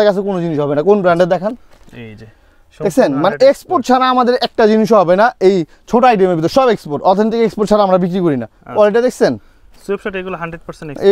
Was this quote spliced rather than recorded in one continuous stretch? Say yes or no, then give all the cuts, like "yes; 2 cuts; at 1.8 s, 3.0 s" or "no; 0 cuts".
no; 0 cuts